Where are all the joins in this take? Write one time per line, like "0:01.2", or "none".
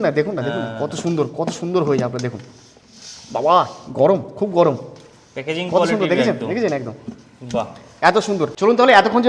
none

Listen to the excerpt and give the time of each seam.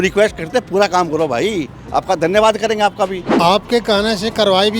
0:03.2

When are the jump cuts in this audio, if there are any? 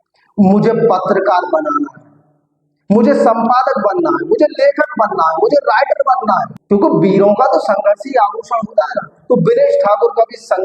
0:06.6

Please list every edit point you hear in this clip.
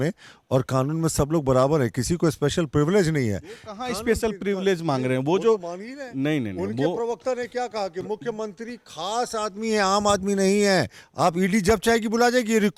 none

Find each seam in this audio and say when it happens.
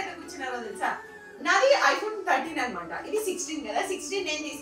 none

